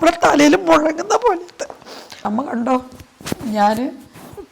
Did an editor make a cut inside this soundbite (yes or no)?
yes